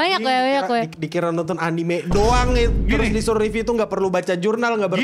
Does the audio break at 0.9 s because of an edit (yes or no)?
yes